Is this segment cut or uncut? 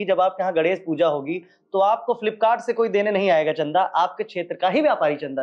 uncut